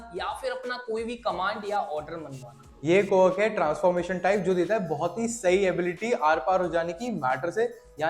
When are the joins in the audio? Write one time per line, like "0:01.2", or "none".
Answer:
0:02.8